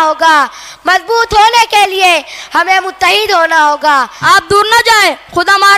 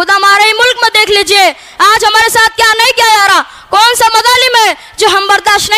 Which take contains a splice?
first; 1 cut; at 4.1 s

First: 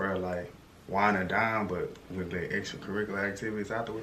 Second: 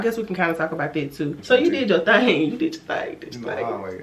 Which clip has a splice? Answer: second; 1 cut; at 1.4 s

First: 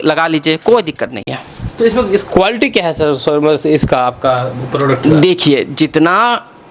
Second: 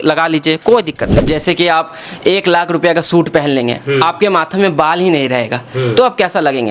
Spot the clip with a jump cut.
second; 1 cut; at 1.3 s

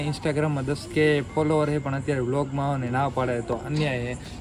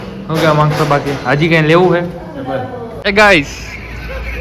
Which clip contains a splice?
second; 1 cut; at 2.8 s

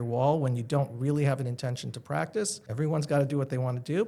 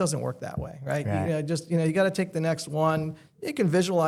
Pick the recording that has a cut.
first; 1 cut; at 2.6 s

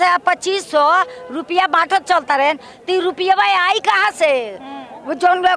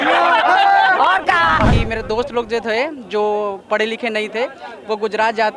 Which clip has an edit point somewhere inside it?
second; 1 cut; at 1.7 s

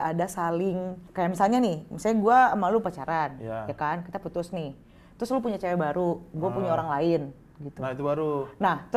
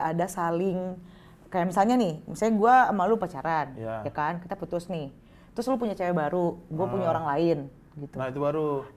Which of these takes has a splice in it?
first; 1 cut; at 1.0 s

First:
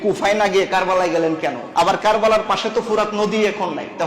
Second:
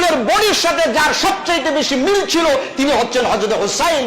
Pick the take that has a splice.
first; 1 cut; at 1.6 s

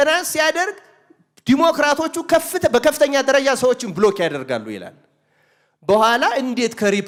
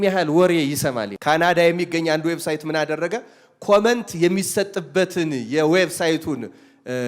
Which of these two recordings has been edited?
second; 1 cut; at 1.1 s

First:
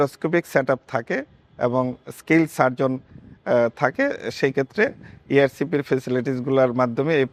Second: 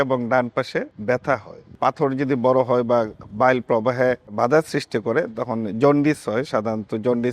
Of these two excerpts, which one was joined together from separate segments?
second; 3 cuts; at 0.9 s, 1.7 s, 4.3 s

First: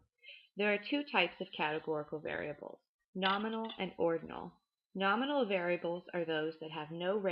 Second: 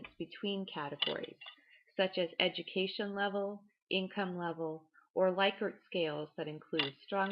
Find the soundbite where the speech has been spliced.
second; 1 cut; at 4.1 s

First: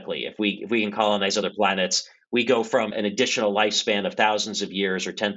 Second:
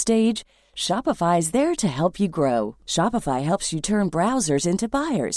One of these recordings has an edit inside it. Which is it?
first; 1 cut; at 2.9 s

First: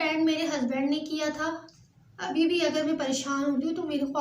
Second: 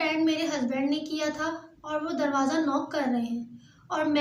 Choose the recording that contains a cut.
first; 1 cut; at 1.7 s

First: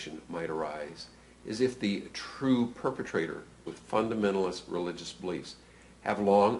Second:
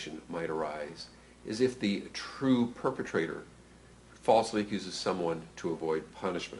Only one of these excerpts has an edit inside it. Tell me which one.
second; 1 cut; at 3.5 s

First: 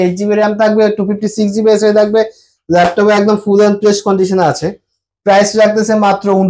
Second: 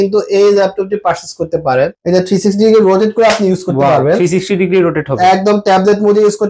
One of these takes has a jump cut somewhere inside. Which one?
second; 1 cut; at 2.0 s

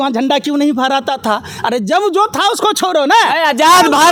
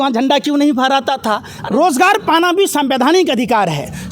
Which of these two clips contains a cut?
second; 1 cut; at 1.5 s

